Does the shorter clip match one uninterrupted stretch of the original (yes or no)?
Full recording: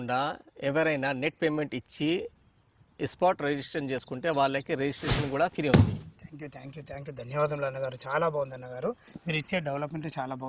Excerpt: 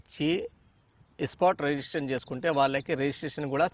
yes